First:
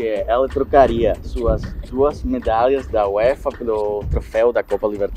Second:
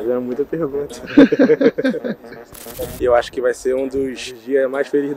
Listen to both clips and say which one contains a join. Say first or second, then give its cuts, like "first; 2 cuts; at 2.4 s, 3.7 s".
second; 1 cut; at 2.7 s